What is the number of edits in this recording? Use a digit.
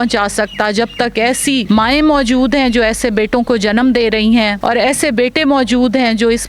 2